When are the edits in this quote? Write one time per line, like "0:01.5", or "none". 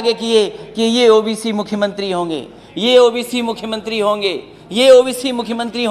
none